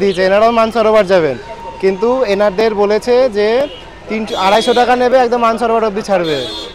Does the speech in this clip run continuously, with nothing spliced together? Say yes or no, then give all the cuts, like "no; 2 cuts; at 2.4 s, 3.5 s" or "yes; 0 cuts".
yes; 0 cuts